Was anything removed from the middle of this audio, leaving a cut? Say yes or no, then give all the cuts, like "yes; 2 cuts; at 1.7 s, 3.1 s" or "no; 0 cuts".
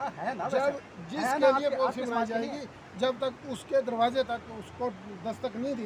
no; 0 cuts